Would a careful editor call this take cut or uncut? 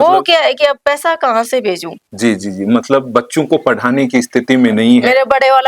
uncut